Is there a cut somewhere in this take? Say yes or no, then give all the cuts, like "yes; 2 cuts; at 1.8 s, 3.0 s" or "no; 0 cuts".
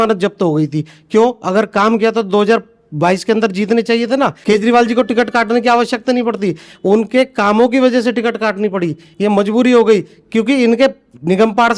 yes; 1 cut; at 4.4 s